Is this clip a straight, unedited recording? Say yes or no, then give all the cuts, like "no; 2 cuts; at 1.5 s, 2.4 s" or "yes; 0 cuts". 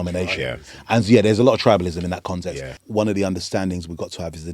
no; 1 cut; at 2.8 s